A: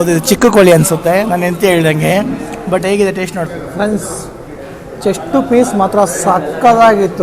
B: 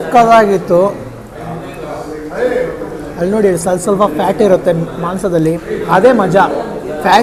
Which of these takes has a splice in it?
A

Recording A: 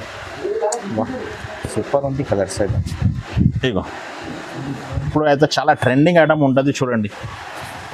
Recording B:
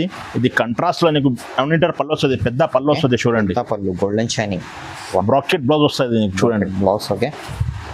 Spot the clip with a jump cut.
A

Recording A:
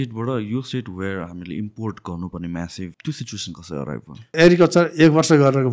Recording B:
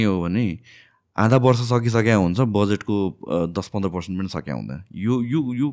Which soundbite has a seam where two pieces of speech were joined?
A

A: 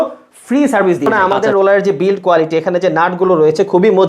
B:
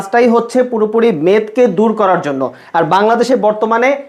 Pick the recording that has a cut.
A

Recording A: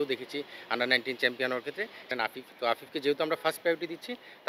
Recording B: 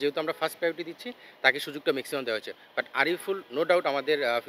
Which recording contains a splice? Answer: A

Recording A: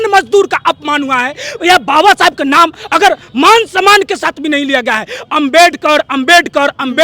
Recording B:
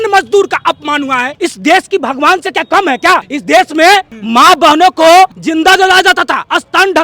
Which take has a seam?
B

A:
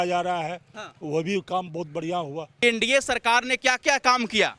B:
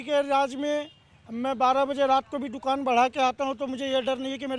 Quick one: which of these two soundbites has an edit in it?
A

